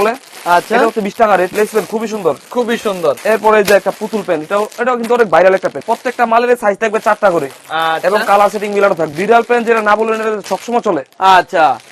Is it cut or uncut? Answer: cut